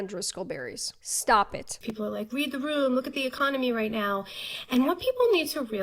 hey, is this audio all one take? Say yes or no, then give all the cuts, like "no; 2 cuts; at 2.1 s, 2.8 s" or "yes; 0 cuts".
no; 2 cuts; at 0.9 s, 1.7 s